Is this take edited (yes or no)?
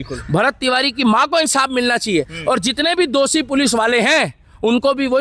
no